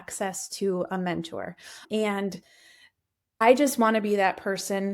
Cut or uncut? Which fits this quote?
cut